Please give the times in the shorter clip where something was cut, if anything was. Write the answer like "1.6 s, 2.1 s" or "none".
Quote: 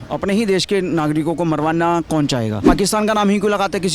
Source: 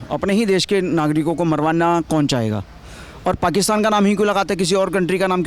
2.6 s